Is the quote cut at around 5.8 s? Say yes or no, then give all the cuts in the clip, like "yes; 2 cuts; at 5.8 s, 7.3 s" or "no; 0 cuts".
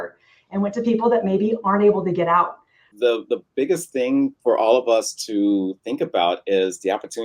no; 1 cut; at 2.8 s